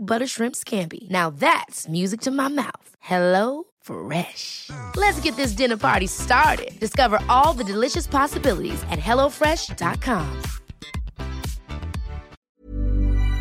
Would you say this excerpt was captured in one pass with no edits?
no; 1 cut; at 12.4 s

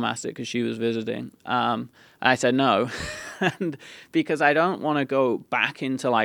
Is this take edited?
no; 0 cuts

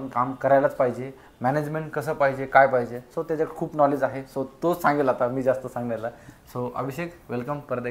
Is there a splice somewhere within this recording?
no; 0 cuts

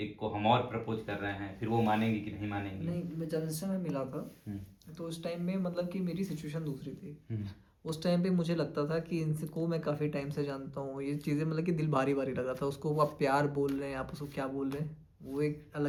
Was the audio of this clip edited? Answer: no; 0 cuts

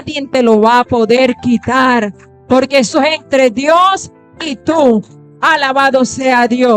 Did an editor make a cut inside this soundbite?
no; 0 cuts

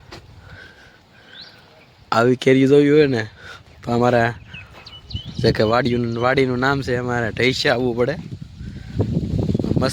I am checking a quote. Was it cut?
no; 0 cuts

